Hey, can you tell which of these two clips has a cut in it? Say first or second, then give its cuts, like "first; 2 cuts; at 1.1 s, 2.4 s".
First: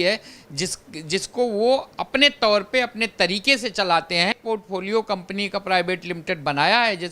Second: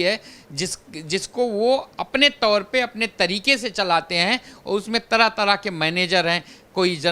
first; 1 cut; at 4.4 s